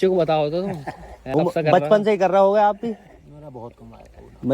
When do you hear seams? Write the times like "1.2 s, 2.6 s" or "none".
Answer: 1.1 s